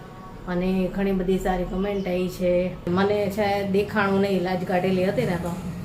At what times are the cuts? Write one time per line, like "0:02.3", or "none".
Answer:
0:02.9